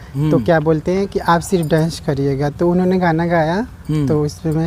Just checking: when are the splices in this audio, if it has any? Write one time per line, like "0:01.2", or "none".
none